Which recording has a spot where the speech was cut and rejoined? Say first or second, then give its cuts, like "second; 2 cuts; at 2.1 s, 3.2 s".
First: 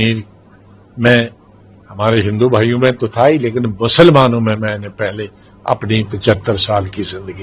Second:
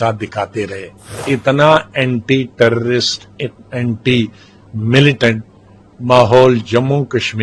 second; 1 cut; at 1.2 s